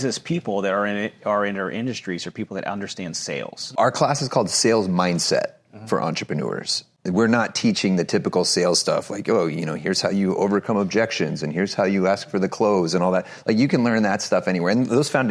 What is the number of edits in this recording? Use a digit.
2